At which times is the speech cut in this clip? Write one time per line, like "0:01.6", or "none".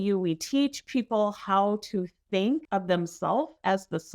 0:02.7